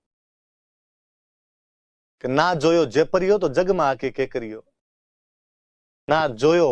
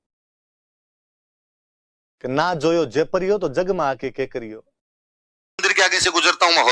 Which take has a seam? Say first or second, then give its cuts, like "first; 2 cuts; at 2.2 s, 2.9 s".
second; 1 cut; at 5.6 s